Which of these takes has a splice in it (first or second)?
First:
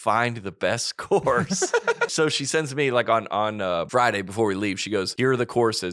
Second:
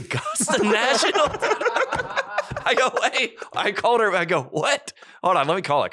first